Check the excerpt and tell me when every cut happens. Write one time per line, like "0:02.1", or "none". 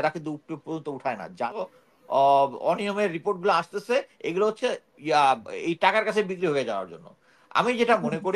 0:01.6